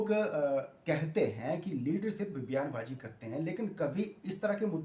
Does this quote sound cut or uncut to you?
uncut